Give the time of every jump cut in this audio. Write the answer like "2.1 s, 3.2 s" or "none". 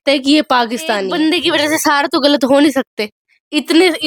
1.1 s